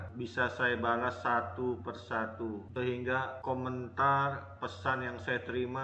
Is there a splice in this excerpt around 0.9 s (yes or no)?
no